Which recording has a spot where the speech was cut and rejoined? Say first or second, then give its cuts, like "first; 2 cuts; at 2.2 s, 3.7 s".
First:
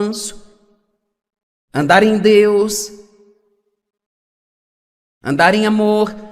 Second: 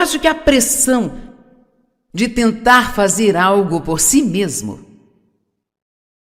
second; 1 cut; at 1.1 s